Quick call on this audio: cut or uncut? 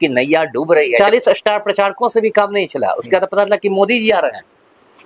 cut